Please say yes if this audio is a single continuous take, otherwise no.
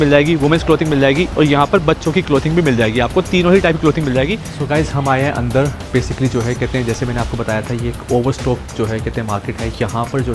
no